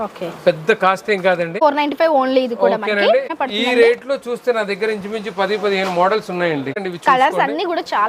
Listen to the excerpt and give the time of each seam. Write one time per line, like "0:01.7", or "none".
0:01.6
0:03.3
0:06.7